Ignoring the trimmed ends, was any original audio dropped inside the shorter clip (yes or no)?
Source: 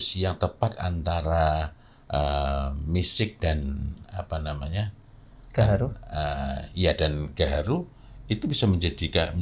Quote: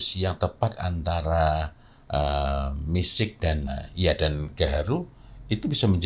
yes